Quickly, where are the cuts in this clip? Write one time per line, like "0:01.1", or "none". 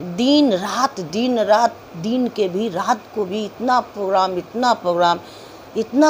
none